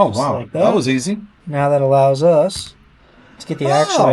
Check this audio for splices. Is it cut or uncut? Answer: cut